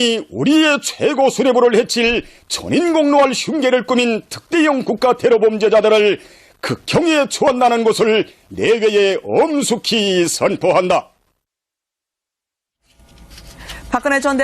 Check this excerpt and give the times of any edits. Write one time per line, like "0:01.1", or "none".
0:02.9